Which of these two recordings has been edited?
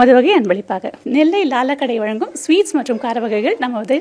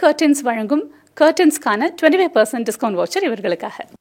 first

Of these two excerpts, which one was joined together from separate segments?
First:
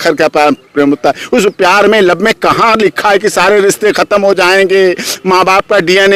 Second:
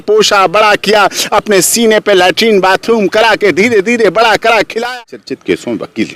second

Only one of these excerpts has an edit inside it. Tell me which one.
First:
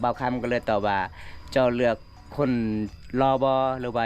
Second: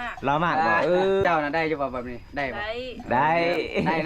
second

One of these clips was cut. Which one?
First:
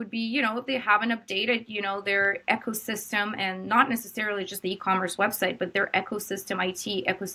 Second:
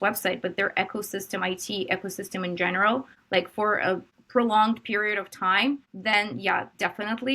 second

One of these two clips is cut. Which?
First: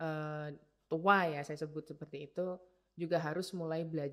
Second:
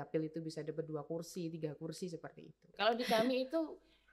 second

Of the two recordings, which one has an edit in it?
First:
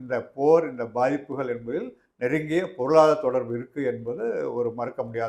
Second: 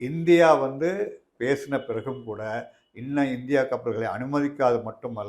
second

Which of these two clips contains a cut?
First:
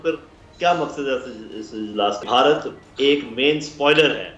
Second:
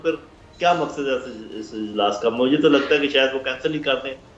first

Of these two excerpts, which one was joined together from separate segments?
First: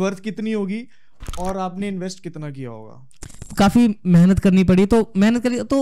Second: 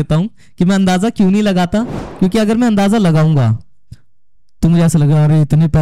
first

